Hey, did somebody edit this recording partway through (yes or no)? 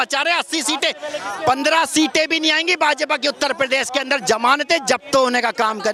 no